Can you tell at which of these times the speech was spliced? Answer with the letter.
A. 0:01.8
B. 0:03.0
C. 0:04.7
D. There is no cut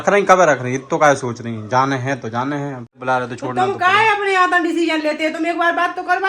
B